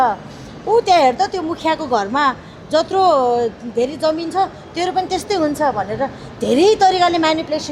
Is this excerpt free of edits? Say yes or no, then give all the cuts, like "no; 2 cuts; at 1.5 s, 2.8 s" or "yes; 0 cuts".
yes; 0 cuts